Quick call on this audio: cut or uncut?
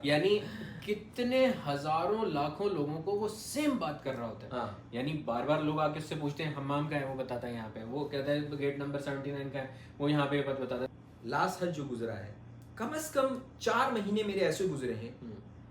cut